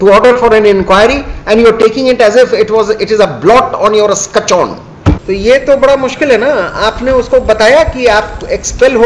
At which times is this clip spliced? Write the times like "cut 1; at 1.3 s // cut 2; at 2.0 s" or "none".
cut 1; at 5.2 s